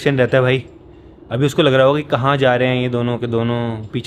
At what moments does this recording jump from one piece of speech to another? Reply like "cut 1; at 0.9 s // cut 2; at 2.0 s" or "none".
none